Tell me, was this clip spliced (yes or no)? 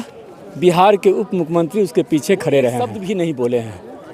yes